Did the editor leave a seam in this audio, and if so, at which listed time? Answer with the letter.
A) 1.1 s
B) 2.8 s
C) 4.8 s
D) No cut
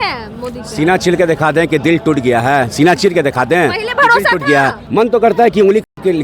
C